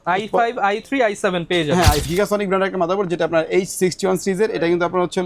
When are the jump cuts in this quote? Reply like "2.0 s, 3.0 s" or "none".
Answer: 2.1 s